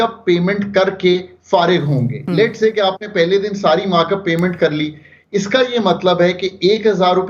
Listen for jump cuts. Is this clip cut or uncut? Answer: uncut